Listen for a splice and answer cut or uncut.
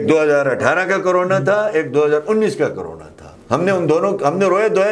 uncut